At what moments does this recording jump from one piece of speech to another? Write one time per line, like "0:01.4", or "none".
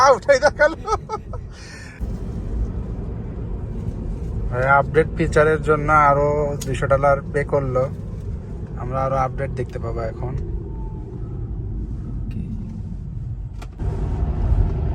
0:02.0
0:13.8